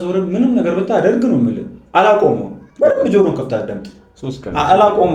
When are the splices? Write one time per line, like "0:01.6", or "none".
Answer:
none